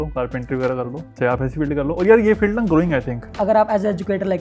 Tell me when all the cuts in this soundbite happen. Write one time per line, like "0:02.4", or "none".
0:01.0
0:03.3

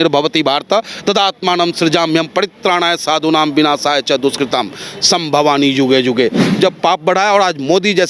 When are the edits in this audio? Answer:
0:06.5

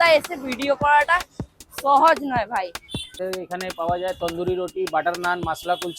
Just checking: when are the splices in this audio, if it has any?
0:02.7

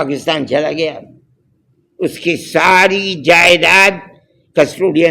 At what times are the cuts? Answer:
none

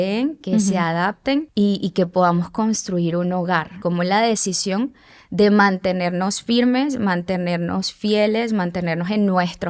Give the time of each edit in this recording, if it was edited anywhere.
0:01.5
0:03.8

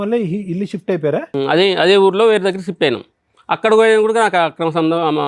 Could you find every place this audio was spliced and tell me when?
0:01.3

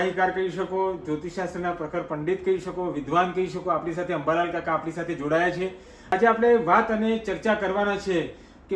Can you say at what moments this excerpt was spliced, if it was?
0:06.1

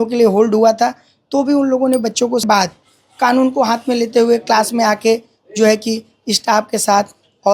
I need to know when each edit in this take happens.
0:02.4

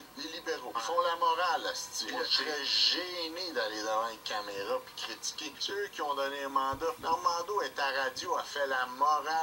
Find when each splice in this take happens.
none

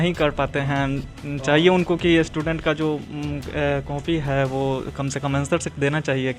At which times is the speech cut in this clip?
none

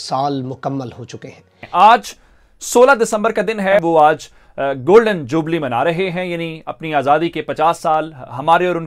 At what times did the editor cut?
0:01.4
0:03.8

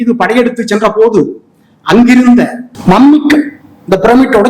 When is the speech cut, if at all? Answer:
0:02.7

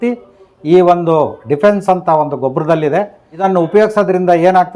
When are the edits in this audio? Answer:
0:03.4

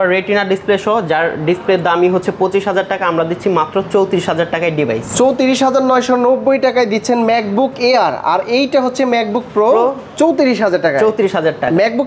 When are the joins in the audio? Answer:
none

